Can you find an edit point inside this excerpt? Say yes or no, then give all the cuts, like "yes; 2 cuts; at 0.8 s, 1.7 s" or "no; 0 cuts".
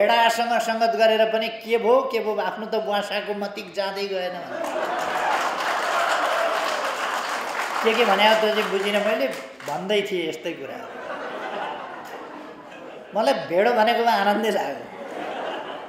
no; 0 cuts